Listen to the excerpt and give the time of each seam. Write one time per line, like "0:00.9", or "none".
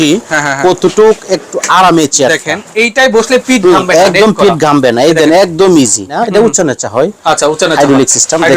0:06.2